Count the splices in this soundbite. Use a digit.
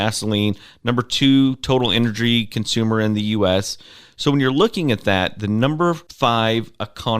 1